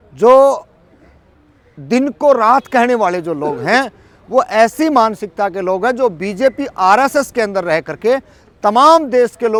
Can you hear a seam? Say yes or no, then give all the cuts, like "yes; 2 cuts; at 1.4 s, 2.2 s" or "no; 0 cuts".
no; 0 cuts